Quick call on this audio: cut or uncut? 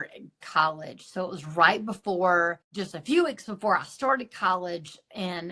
cut